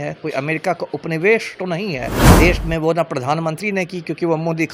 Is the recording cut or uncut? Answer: cut